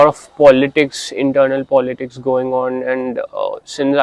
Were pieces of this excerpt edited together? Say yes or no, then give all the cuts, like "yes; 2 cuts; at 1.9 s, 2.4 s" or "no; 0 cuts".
no; 0 cuts